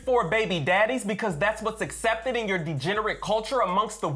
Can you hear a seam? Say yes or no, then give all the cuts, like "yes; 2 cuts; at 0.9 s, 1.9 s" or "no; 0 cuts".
no; 0 cuts